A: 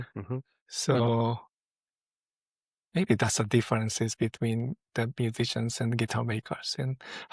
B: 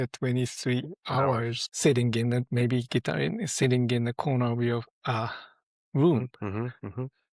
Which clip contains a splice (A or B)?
B